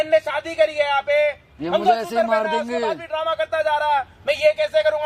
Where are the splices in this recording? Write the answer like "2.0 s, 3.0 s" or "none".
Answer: none